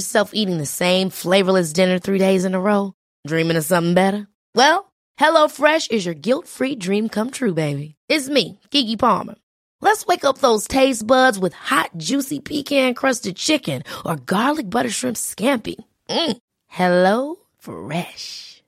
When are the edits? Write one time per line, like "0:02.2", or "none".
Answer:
none